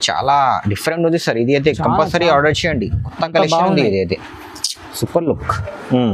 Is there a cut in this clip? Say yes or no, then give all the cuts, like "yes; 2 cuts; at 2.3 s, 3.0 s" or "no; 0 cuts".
no; 0 cuts